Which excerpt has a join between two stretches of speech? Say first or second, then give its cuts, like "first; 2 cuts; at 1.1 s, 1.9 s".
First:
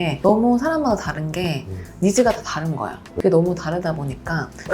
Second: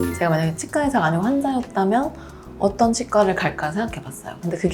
first; 1 cut; at 3.2 s